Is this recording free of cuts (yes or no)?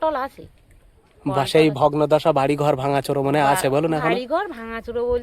yes